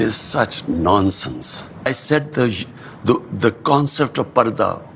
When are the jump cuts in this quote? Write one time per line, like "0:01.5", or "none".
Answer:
0:01.9